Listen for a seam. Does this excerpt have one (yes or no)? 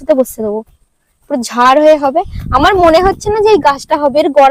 no